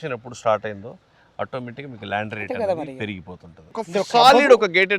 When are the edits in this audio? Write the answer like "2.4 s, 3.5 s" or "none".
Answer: 3.7 s